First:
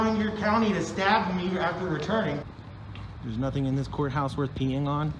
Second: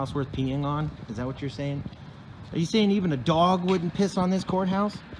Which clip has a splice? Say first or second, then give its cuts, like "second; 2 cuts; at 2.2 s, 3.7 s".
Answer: first; 1 cut; at 2.6 s